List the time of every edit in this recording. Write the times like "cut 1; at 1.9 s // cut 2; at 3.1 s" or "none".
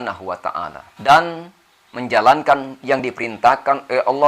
cut 1; at 1.1 s